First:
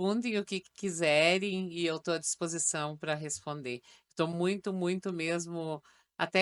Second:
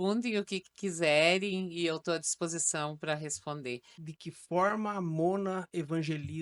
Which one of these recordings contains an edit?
second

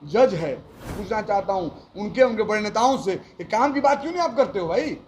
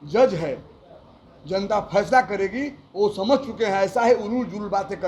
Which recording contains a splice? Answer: first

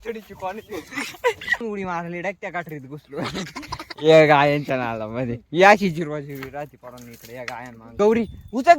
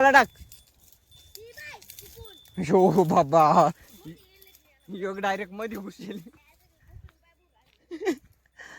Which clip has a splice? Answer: first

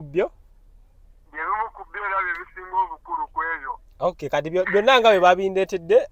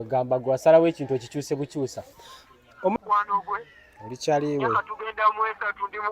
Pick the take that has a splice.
second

